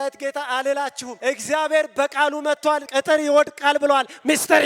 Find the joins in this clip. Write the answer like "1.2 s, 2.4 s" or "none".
1.1 s, 2.7 s